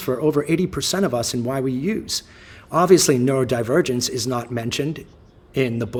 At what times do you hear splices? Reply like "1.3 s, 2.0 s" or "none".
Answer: none